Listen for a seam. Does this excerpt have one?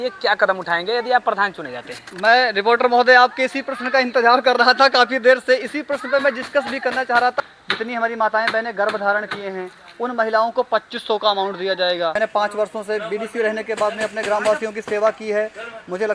yes; 2 cuts; at 7.4 s, 12.2 s

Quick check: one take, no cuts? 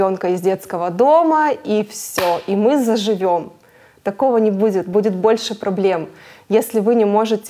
yes; 0 cuts

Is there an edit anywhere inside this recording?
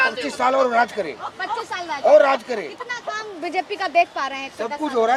no; 0 cuts

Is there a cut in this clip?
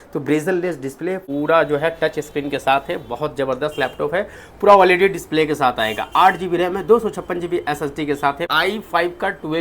yes; 2 cuts; at 1.2 s, 8.5 s

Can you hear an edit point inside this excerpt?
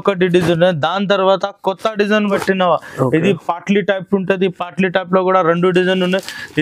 yes; 1 cut; at 2.3 s

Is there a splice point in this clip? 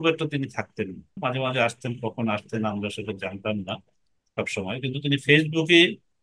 yes; 1 cut; at 1.2 s

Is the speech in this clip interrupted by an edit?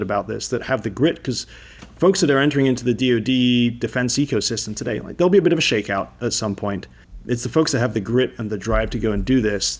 no; 0 cuts

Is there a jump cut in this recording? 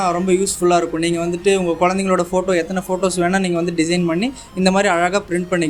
no; 0 cuts

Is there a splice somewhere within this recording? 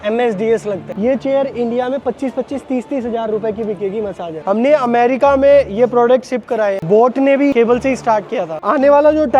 yes; 4 cuts; at 0.9 s, 4.4 s, 6.8 s, 8.6 s

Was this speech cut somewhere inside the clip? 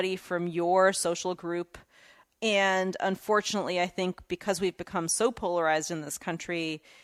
no; 0 cuts

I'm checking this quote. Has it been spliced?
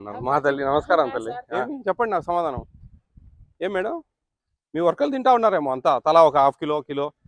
yes; 1 cut; at 1.6 s

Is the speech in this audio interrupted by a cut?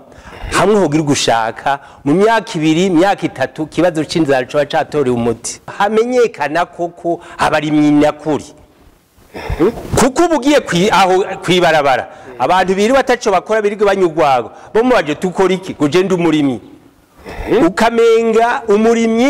yes; 1 cut; at 5.7 s

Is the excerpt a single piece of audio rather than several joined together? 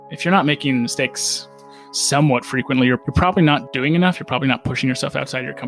no; 1 cut; at 3.7 s

